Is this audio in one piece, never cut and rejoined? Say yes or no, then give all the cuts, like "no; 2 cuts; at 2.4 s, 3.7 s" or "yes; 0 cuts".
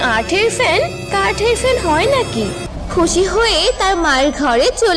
no; 1 cut; at 2.9 s